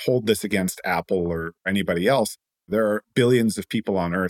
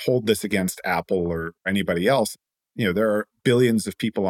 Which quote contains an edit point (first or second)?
first